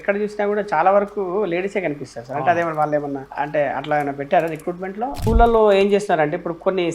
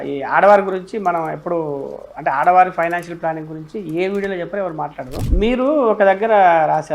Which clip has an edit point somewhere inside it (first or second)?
first